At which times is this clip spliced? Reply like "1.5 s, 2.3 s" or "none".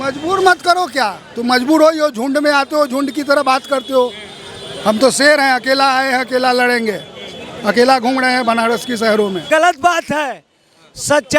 9.5 s